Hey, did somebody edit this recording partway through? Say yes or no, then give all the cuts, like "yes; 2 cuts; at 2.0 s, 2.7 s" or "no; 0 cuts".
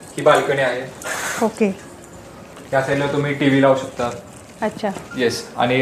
yes; 1 cut; at 2.5 s